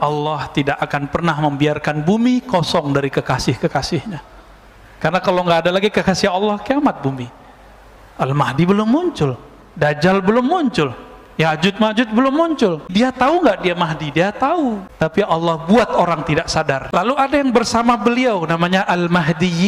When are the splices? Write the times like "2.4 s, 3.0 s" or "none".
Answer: 12.9 s, 15.0 s, 17.1 s